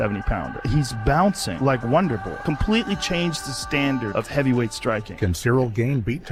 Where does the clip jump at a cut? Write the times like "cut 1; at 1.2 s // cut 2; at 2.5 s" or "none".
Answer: none